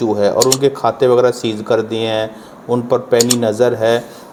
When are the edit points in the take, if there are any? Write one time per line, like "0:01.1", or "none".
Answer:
none